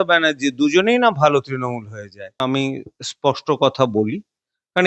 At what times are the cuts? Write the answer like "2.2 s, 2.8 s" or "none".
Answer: 2.4 s